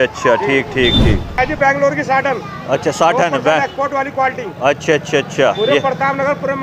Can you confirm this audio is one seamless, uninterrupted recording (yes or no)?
no